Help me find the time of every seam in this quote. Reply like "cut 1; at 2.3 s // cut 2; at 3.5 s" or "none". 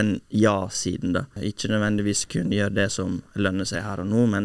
cut 1; at 1.3 s